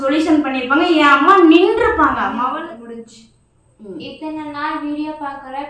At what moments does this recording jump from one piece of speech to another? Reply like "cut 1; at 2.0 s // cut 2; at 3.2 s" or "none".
cut 1; at 2.3 s